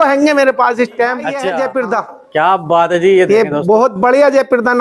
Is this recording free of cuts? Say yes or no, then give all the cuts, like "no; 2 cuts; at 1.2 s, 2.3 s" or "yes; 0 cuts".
no; 1 cut; at 1.3 s